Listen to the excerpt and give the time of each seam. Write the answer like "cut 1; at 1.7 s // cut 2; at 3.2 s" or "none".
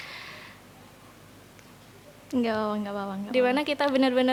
none